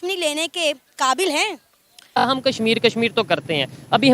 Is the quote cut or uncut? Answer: cut